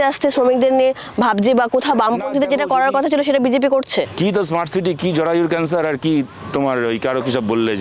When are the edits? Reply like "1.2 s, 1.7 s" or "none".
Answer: 4.1 s